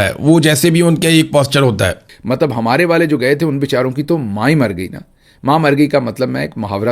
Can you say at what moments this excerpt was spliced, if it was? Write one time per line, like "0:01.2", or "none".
0:02.1